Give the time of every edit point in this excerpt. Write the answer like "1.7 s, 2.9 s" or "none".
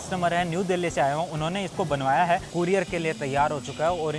2.5 s